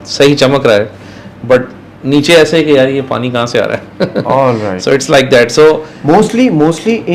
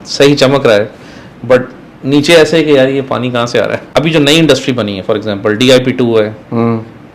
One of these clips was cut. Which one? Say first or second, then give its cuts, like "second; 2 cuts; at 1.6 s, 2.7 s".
second; 1 cut; at 3.8 s